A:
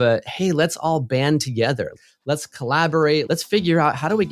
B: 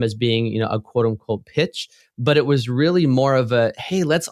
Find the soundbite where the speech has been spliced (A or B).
A